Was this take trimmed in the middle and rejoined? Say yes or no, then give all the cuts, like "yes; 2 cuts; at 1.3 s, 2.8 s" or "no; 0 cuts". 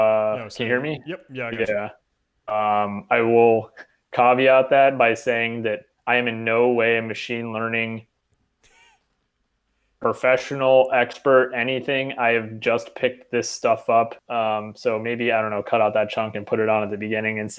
yes; 1 cut; at 14.2 s